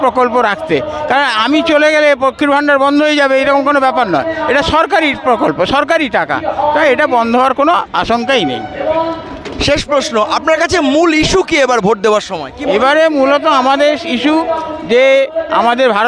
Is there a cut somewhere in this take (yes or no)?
no